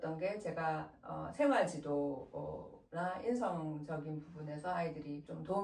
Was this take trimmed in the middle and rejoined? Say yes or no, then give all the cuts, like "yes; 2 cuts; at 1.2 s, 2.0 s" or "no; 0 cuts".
no; 0 cuts